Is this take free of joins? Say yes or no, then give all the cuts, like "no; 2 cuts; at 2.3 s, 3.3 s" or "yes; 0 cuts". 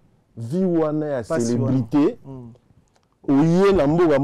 yes; 0 cuts